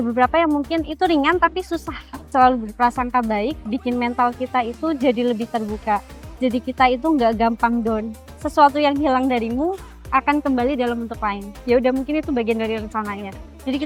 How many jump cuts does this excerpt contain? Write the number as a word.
three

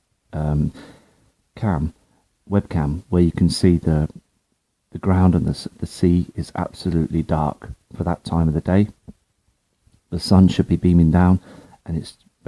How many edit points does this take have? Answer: one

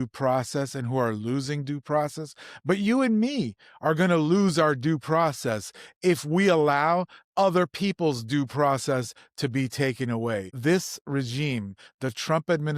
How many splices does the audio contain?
zero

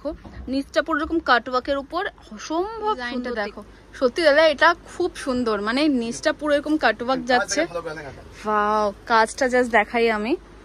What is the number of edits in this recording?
one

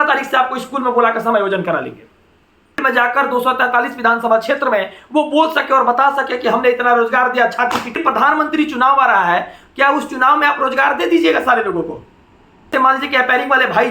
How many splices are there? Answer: three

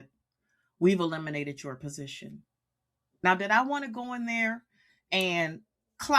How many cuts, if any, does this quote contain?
one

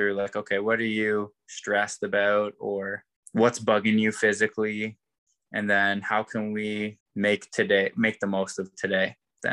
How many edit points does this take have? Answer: two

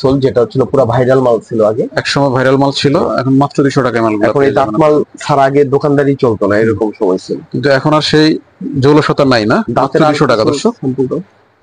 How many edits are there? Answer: zero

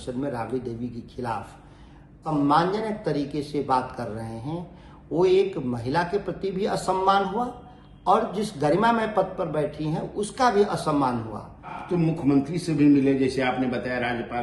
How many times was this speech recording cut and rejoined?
two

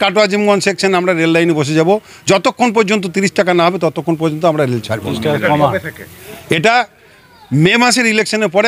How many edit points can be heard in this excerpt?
zero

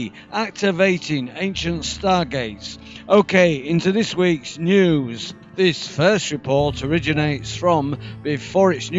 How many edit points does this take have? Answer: zero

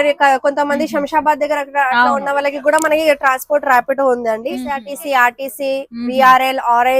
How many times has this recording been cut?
one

